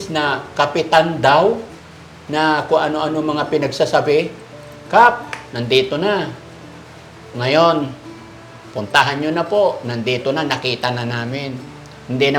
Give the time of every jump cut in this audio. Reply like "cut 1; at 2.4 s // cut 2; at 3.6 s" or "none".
none